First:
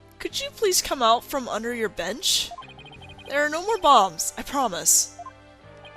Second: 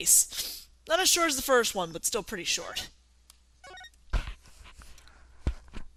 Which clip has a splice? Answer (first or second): first